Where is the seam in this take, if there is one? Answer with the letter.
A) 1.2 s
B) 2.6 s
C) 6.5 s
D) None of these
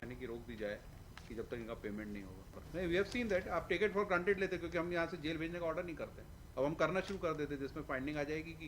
B